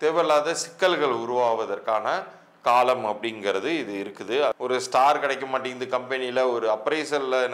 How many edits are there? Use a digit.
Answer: 1